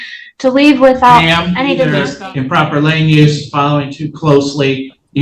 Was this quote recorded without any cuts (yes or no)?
no